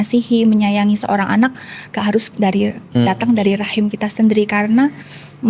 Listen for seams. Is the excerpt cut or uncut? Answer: uncut